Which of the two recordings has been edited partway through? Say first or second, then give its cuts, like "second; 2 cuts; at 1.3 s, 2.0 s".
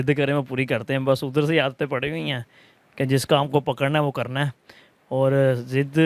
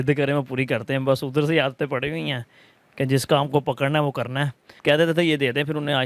second; 1 cut; at 4.7 s